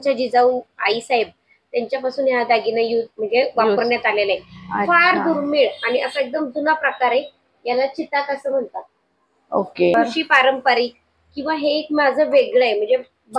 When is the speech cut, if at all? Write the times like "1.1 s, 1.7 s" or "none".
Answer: 9.9 s